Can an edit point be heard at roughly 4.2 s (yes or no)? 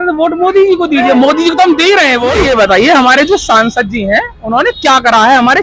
no